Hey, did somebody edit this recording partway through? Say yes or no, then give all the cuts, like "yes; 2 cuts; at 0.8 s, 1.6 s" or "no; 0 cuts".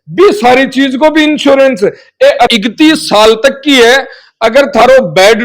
yes; 1 cut; at 2.5 s